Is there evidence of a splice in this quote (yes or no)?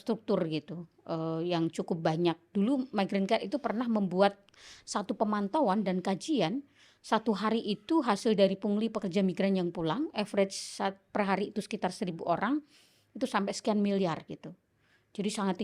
no